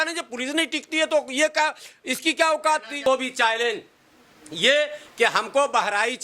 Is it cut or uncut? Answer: cut